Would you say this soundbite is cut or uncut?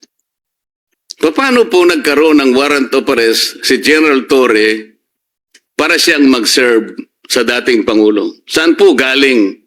uncut